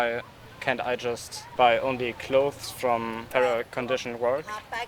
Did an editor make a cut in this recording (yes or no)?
yes